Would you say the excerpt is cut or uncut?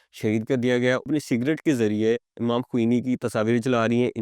cut